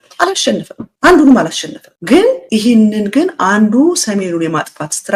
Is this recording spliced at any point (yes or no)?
no